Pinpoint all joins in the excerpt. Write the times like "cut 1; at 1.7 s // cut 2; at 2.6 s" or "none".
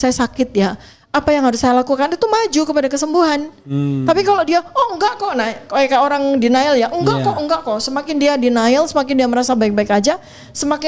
none